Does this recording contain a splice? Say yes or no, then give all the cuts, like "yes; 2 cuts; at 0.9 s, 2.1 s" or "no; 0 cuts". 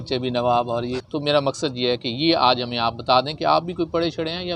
yes; 1 cut; at 1.0 s